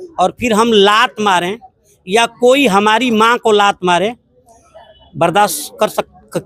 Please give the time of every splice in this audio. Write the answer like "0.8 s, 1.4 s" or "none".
none